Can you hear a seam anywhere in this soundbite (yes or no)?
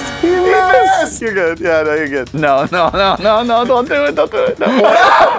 yes